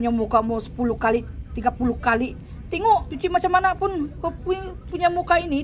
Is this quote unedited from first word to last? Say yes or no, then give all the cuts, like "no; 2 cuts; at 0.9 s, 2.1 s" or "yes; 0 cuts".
no; 1 cut; at 3.1 s